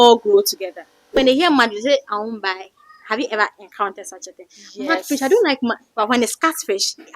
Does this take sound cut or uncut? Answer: cut